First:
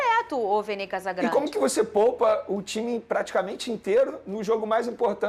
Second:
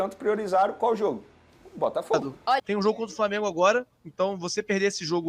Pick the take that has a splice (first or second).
second